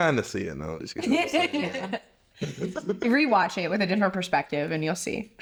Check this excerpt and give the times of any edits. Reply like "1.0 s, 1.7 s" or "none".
none